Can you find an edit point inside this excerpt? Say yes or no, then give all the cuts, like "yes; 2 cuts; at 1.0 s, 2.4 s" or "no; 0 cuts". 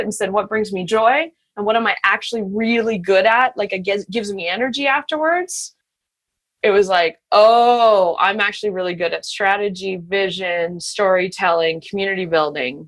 no; 0 cuts